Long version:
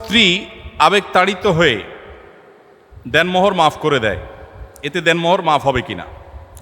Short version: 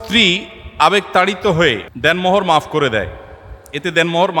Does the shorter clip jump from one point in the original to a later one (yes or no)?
yes